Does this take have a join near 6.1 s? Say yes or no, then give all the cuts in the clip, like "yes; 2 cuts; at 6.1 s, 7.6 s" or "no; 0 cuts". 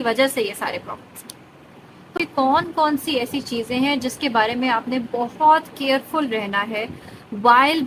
no; 1 cut; at 2.1 s